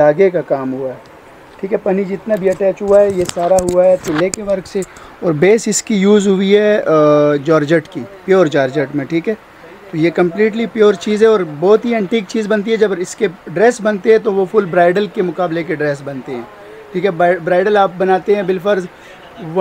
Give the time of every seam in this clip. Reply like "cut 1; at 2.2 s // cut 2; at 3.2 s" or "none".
none